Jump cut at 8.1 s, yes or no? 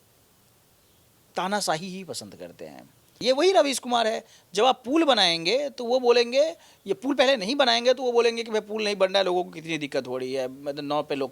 no